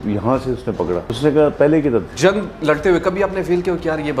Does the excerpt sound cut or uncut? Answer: cut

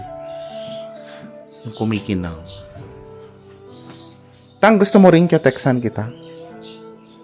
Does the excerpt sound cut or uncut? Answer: uncut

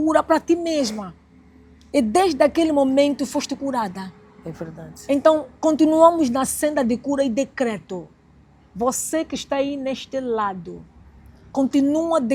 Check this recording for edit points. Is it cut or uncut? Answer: uncut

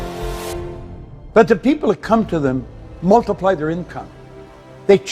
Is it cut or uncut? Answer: uncut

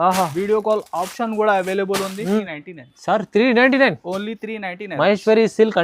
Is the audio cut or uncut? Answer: cut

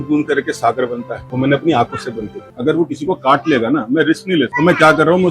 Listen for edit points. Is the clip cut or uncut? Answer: cut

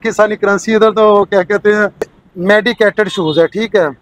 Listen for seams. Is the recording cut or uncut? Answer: cut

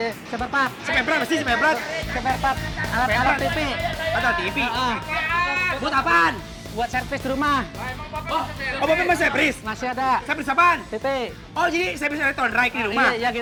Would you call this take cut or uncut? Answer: uncut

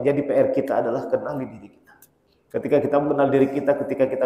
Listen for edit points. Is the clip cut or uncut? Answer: cut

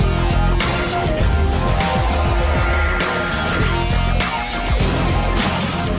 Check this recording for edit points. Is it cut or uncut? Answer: uncut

